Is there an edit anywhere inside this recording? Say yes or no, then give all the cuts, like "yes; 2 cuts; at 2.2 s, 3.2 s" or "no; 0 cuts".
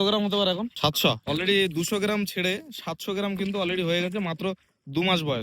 yes; 1 cut; at 1.1 s